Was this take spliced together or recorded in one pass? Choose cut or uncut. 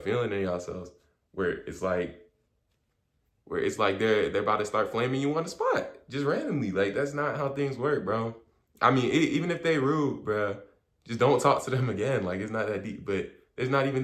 uncut